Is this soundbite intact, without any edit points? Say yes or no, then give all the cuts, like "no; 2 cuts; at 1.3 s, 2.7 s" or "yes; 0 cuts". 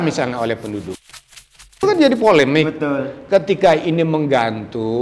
no; 1 cut; at 1.6 s